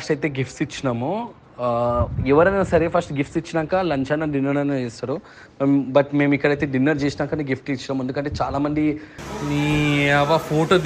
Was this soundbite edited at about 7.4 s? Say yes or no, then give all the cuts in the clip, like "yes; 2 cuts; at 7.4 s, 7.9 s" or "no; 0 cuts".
no; 1 cut; at 9.1 s